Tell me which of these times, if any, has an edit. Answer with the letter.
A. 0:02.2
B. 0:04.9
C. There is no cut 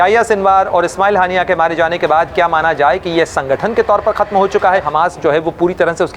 B